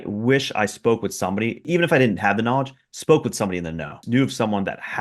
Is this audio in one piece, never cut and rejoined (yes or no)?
no